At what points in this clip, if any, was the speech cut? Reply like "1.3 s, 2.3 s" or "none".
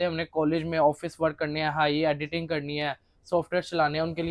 none